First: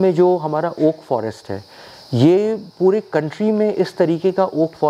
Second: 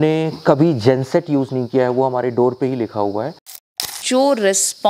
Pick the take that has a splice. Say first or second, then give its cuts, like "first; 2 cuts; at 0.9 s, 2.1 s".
second; 1 cut; at 3.9 s